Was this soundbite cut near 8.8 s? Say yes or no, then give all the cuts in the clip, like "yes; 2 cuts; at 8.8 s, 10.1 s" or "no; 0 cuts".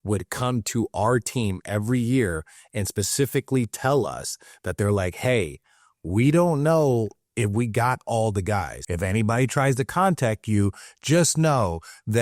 yes; 1 cut; at 8.8 s